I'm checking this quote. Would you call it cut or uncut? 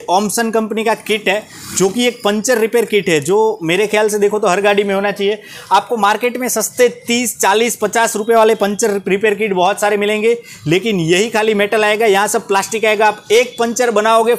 uncut